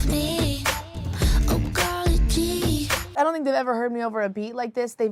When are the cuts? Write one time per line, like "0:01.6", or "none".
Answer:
0:03.0